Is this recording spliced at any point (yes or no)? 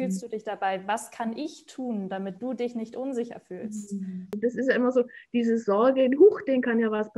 yes